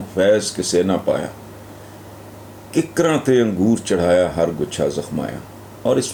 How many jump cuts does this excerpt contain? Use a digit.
0